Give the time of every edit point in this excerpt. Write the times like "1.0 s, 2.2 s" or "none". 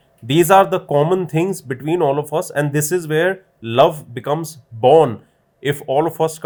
none